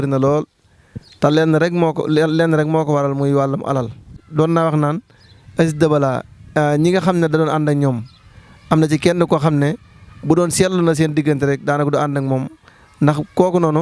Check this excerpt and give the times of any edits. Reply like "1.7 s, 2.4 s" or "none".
4.2 s